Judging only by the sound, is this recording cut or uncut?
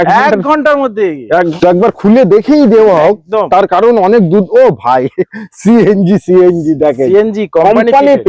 cut